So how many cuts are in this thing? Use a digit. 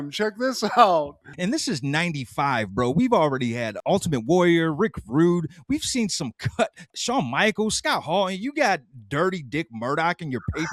1